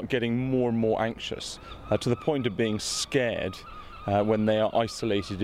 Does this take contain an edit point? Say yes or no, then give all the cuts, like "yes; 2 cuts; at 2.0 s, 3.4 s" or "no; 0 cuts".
no; 0 cuts